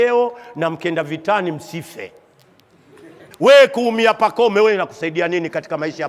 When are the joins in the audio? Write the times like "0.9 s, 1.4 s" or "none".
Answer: 3.2 s